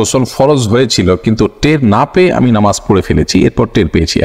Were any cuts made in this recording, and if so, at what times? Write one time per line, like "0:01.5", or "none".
none